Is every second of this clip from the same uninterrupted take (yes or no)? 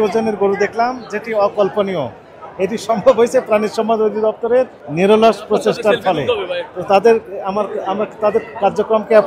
yes